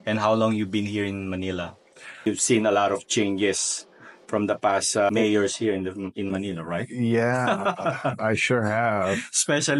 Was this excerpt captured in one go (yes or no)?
no